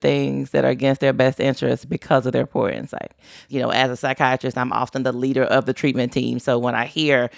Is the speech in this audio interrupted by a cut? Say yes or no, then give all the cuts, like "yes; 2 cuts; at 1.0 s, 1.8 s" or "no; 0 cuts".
yes; 1 cut; at 3.2 s